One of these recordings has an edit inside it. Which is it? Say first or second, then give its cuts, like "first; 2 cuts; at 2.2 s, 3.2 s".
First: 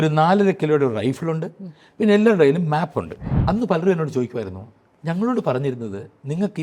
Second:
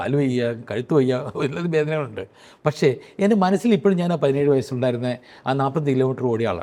first; 1 cut; at 3.2 s